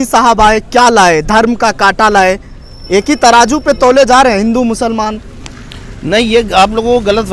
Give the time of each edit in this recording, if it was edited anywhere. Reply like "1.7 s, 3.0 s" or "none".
none